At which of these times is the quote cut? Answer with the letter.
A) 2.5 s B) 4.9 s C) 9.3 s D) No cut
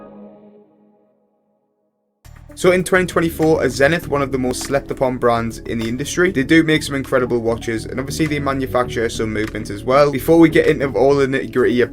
A